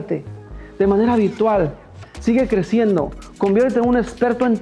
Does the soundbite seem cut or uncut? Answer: uncut